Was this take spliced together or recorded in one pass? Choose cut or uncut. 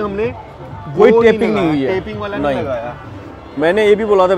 uncut